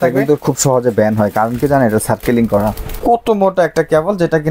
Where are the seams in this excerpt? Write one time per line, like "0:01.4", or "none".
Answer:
0:02.9